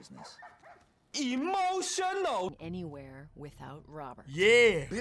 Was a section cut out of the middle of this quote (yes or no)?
yes